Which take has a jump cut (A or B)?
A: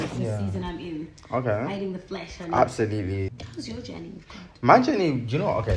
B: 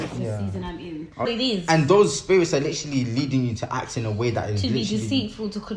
B